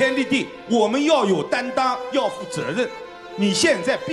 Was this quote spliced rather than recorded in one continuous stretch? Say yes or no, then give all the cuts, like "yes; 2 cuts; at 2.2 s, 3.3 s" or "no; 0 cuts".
no; 0 cuts